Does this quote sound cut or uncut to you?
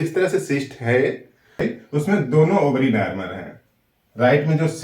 cut